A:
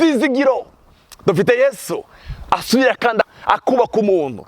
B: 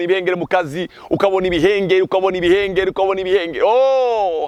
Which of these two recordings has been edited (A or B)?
A